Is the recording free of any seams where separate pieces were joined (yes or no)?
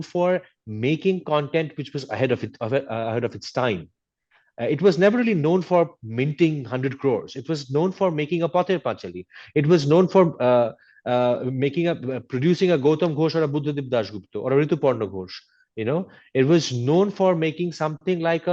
yes